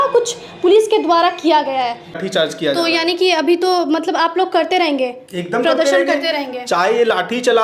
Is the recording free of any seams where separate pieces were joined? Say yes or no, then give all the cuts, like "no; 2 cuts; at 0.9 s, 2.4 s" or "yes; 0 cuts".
no; 1 cut; at 2.2 s